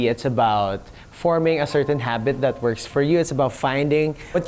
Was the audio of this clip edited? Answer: no; 0 cuts

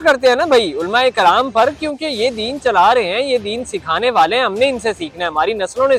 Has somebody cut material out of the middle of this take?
no; 0 cuts

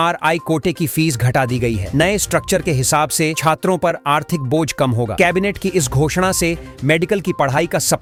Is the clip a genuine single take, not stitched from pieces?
yes; 0 cuts

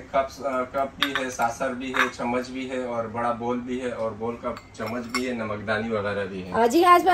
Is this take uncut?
yes; 0 cuts

